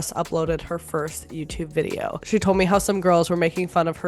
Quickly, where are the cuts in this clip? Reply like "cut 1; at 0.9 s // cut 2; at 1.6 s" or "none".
cut 1; at 2.2 s